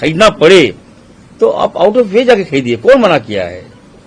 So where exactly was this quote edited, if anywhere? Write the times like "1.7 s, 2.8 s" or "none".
none

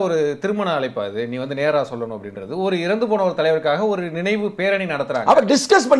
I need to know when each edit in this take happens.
none

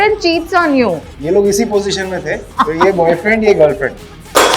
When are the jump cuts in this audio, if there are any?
1.0 s, 2.5 s

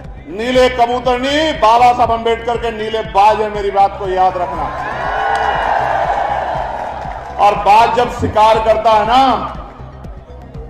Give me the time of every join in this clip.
none

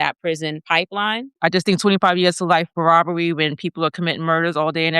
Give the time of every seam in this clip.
1.3 s

